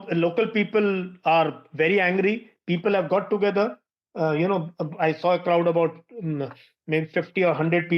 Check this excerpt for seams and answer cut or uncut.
uncut